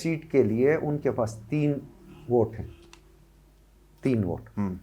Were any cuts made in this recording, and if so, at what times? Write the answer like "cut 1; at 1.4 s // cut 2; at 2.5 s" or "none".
none